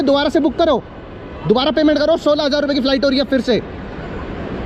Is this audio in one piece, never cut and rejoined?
yes; 0 cuts

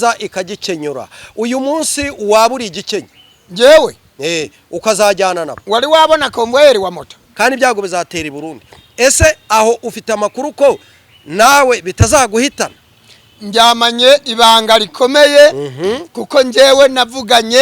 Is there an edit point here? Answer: yes; 1 cut; at 7.2 s

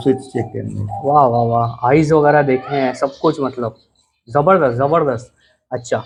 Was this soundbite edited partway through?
no; 0 cuts

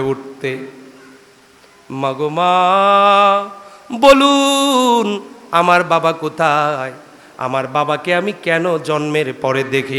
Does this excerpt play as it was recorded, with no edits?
yes; 0 cuts

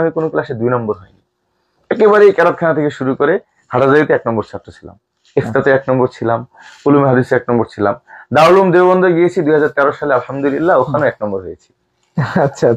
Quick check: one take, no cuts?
yes; 0 cuts

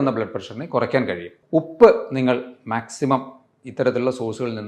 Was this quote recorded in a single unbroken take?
no; 1 cut; at 1.3 s

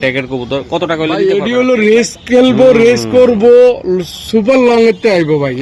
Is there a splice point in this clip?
yes; 1 cut; at 1.2 s

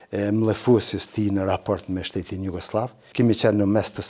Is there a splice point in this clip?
yes; 1 cut; at 3.0 s

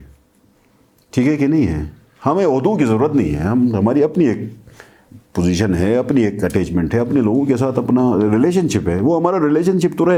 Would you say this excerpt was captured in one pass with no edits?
yes; 0 cuts

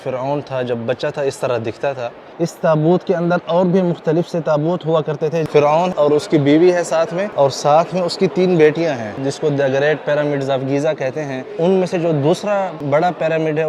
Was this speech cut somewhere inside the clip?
yes; 6 cuts; at 2.2 s, 5.9 s, 7.2 s, 9.2 s, 11.4 s, 12.8 s

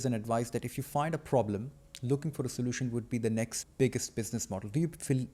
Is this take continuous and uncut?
no; 1 cut; at 3.6 s

